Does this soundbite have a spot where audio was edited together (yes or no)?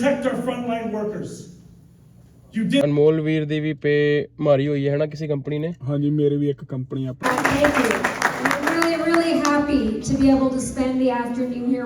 yes